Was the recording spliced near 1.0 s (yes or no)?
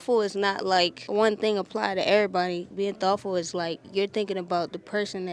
yes